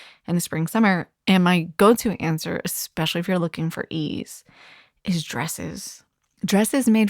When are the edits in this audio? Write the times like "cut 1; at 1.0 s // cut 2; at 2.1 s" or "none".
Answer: cut 1; at 1.7 s